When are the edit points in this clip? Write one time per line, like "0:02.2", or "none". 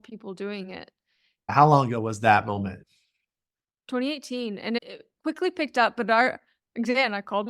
0:02.8